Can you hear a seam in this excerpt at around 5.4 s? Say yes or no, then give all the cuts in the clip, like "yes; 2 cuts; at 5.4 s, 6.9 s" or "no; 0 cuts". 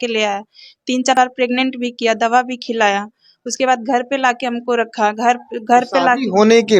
no; 1 cut; at 1.1 s